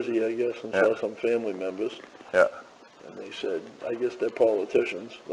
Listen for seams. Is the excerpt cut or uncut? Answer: uncut